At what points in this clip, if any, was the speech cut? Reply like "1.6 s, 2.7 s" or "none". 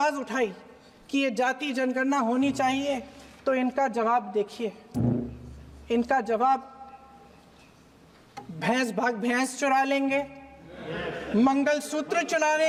none